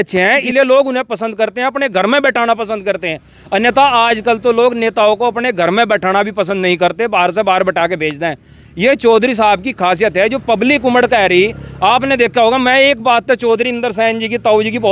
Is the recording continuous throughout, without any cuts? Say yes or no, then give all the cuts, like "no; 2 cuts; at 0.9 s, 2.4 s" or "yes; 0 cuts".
yes; 0 cuts